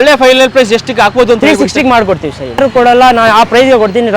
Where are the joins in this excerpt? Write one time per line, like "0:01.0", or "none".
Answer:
0:02.6